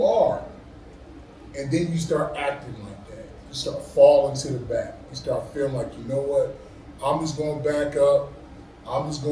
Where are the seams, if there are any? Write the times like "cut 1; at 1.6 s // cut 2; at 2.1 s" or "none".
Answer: none